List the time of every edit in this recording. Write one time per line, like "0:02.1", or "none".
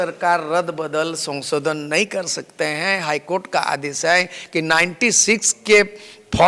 none